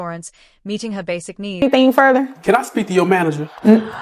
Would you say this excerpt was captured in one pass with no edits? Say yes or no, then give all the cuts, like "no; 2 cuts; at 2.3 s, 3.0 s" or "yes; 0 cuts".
yes; 0 cuts